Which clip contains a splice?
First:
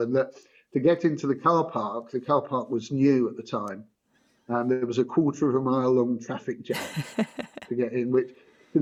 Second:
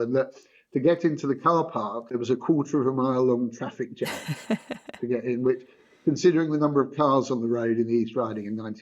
second; 1 cut; at 2.1 s

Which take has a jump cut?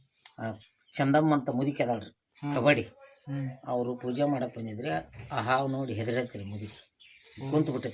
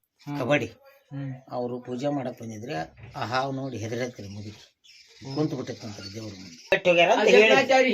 second; 1 cut; at 6.7 s

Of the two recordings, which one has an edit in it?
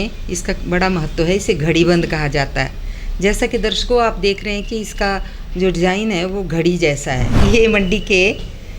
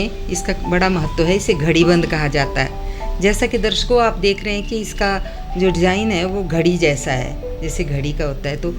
first; 1 cut; at 7.3 s

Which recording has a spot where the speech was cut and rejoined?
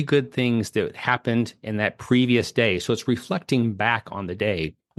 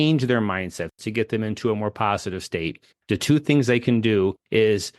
second; 1 cut; at 0.9 s

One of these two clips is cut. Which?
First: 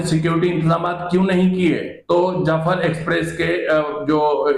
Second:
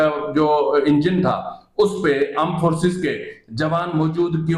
first; 1 cut; at 1.9 s

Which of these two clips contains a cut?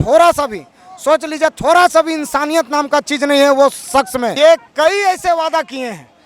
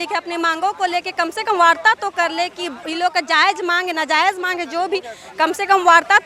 first; 1 cut; at 4.3 s

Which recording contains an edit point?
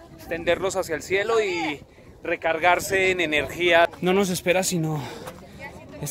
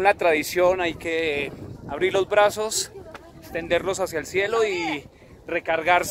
first; 1 cut; at 3.9 s

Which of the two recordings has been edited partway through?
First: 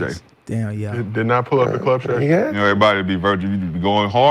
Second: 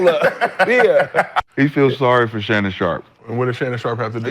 second; 2 cuts; at 1.4 s, 3.1 s

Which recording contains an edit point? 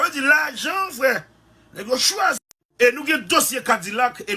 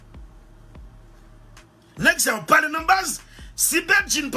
first; 1 cut; at 2.5 s

